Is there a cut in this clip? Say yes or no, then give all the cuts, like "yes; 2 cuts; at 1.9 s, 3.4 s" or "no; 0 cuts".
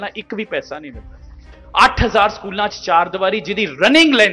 yes; 1 cut; at 1.5 s